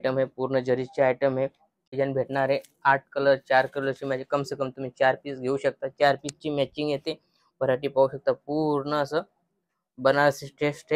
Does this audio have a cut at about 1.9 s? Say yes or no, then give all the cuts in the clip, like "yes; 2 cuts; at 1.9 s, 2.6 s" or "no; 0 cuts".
yes; 1 cut; at 1.9 s